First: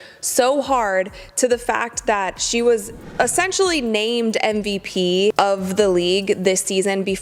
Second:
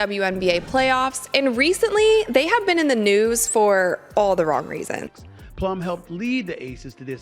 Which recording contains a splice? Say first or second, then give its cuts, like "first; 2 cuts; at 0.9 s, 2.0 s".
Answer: second; 1 cut; at 5.0 s